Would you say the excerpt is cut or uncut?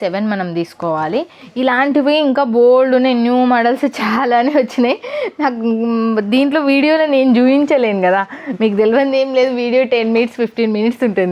cut